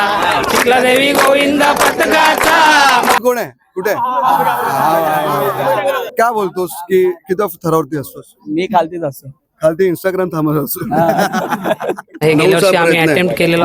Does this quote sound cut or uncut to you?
cut